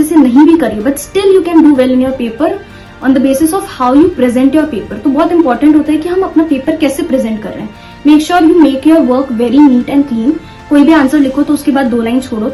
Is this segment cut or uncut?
uncut